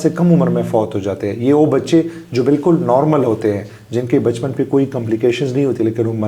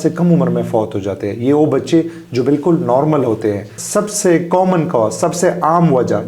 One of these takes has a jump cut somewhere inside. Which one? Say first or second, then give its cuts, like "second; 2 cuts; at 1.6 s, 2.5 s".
second; 1 cut; at 3.8 s